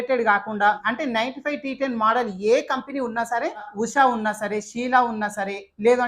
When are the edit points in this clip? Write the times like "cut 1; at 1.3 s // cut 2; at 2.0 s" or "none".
cut 1; at 0.8 s // cut 2; at 3.7 s